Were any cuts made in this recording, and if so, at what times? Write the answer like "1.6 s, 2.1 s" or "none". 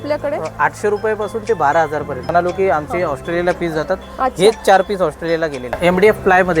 2.3 s, 5.8 s